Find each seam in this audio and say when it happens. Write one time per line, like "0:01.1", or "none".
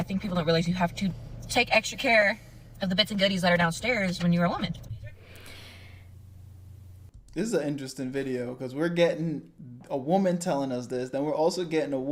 none